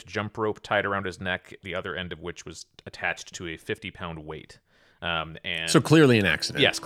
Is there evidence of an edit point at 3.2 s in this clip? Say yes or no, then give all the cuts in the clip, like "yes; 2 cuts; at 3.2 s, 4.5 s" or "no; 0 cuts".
no; 0 cuts